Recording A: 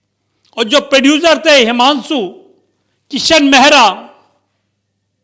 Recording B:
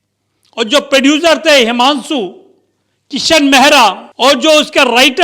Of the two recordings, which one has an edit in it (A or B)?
B